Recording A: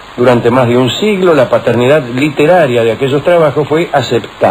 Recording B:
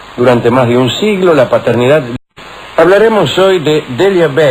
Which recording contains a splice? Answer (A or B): A